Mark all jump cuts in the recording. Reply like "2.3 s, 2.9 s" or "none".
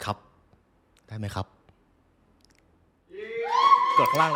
none